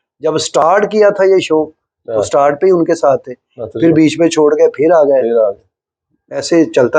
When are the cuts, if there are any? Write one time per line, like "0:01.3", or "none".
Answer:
none